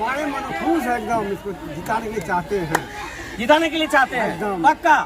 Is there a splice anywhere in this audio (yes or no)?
no